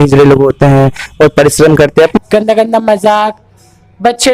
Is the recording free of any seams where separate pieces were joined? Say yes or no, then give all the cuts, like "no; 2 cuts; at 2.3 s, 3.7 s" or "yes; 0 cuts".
no; 1 cut; at 2.2 s